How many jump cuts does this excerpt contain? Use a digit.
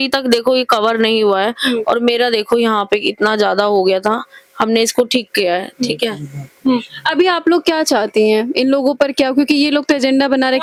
0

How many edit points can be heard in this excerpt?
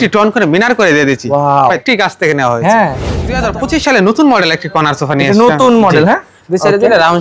2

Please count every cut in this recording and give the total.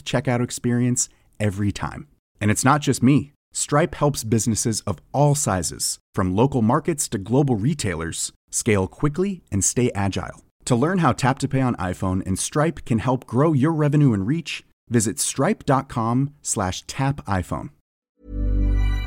1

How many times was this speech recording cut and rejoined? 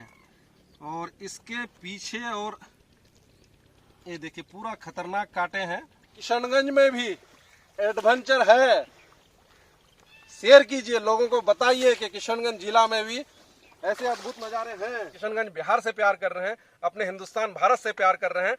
2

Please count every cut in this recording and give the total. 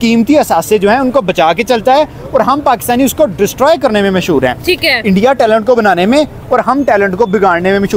0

